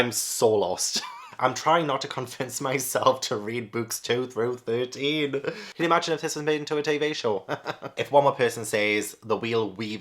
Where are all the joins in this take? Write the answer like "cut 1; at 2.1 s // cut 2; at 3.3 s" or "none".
cut 1; at 1.2 s // cut 2; at 5.7 s // cut 3; at 7.9 s